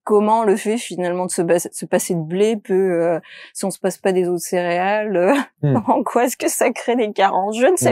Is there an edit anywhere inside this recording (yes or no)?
no